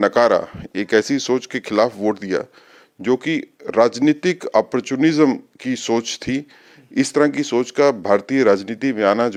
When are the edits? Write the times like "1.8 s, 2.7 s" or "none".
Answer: none